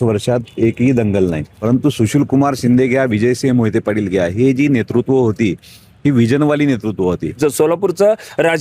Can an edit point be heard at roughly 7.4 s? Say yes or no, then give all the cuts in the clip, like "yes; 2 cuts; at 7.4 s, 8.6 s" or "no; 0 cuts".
yes; 2 cuts; at 1.5 s, 7.4 s